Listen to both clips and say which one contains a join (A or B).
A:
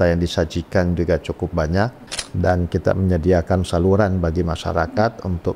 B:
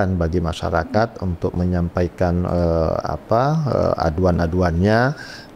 A